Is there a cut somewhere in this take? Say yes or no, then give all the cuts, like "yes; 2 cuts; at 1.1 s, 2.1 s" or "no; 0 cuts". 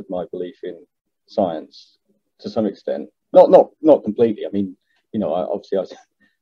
no; 0 cuts